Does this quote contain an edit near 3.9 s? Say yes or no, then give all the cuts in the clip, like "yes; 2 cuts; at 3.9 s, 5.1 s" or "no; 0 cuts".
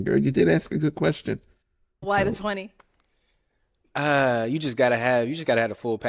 no; 1 cut; at 2.0 s